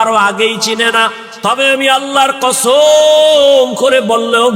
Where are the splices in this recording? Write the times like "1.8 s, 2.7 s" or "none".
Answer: 1.2 s